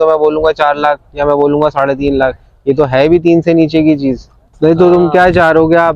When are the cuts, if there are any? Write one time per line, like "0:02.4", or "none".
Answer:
0:04.5

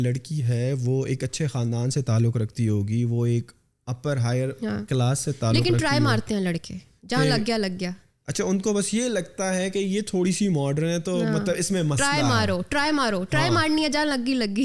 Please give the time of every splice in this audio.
none

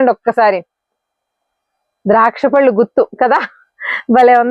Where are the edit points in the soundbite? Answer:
none

